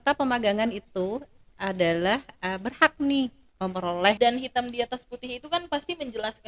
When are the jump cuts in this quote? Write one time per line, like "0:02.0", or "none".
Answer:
0:04.2